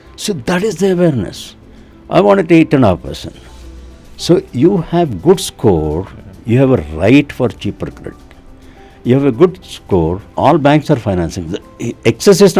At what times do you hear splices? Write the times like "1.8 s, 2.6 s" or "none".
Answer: 10.2 s